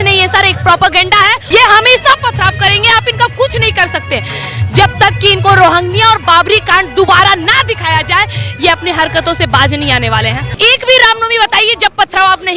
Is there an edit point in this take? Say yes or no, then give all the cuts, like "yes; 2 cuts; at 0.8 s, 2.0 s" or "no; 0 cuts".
yes; 2 cuts; at 1.4 s, 10.5 s